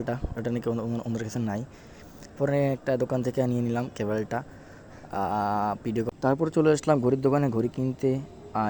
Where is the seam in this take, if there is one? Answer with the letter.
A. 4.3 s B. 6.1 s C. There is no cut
B